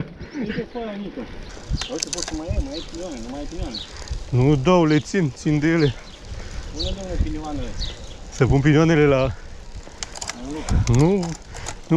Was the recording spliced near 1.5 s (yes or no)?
yes